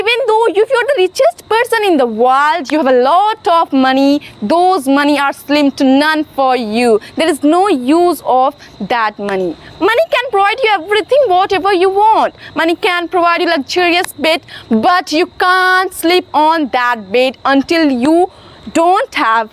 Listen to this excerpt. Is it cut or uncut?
uncut